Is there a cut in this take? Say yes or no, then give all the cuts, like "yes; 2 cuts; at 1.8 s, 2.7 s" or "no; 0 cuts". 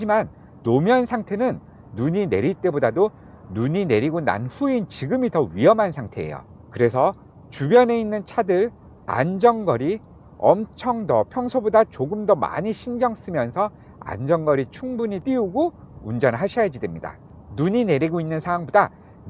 no; 0 cuts